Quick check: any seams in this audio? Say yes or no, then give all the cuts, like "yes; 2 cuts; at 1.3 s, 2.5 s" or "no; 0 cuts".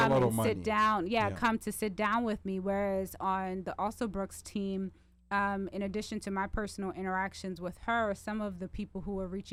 no; 0 cuts